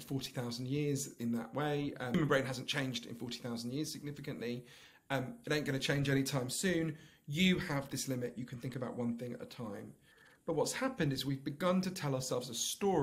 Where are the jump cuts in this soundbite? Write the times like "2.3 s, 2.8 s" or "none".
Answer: 2.1 s